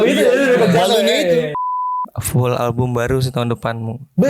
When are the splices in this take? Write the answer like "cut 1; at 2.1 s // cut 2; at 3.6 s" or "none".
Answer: cut 1; at 1.6 s